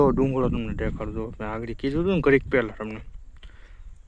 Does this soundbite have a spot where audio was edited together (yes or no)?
no